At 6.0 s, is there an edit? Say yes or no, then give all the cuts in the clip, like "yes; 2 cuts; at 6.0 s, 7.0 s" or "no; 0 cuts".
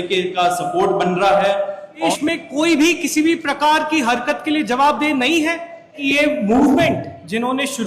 yes; 2 cuts; at 2.1 s, 6.0 s